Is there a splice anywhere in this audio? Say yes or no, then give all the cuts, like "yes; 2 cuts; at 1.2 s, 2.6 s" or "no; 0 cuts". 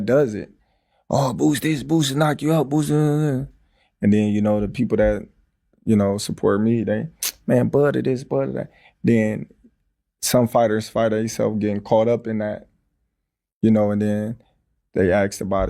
no; 0 cuts